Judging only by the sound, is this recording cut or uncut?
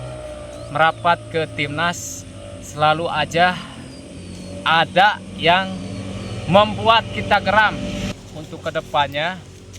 cut